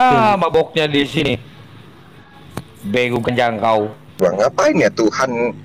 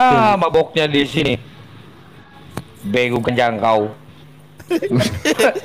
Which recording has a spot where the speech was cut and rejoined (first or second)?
first